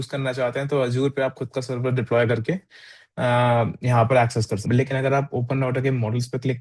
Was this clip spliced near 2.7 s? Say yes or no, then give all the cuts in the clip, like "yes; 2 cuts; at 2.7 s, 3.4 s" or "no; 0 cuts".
no; 1 cut; at 4.6 s